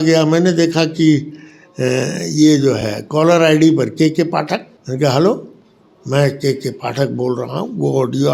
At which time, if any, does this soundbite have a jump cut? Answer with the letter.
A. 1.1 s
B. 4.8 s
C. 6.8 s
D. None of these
B